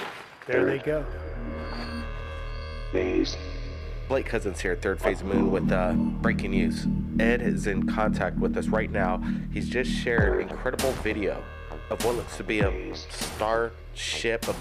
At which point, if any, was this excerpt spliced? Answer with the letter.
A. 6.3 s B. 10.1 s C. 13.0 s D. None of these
C